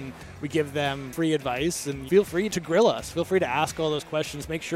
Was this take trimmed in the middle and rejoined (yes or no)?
yes